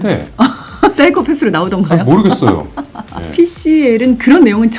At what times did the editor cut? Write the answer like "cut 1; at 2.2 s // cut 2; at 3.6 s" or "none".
cut 1; at 3.1 s